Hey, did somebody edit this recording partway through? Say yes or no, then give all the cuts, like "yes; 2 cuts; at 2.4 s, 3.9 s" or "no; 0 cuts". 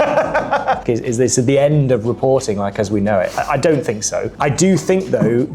yes; 2 cuts; at 0.8 s, 4.3 s